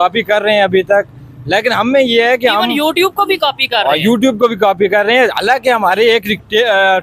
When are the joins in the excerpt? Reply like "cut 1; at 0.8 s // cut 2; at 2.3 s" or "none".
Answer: none